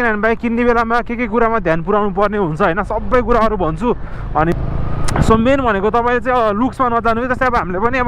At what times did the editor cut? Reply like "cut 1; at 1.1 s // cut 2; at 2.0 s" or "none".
cut 1; at 4.5 s